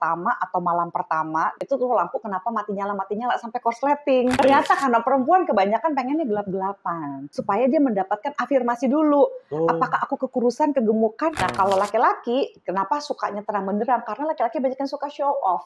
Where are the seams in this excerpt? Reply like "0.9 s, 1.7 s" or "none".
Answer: 1.6 s, 4.3 s, 7.3 s, 11.4 s

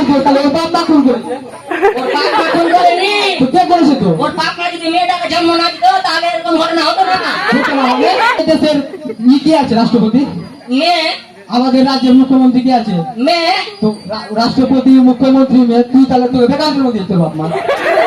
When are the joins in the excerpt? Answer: 8.4 s

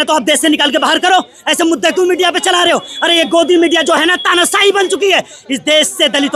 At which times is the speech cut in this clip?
none

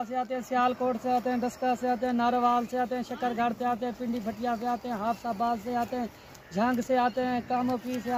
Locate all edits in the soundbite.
none

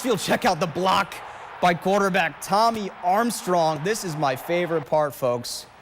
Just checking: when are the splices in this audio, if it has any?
3.8 s

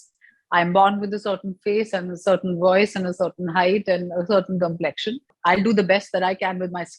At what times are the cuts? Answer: 5.3 s

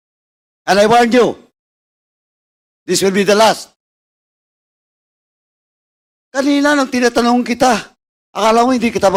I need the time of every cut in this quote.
none

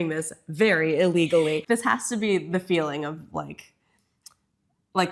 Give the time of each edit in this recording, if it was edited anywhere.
1.6 s

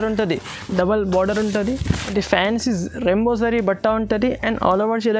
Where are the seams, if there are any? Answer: 2.0 s

